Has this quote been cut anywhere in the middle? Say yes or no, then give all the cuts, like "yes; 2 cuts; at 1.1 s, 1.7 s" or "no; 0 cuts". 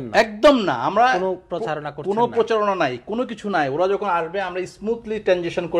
no; 0 cuts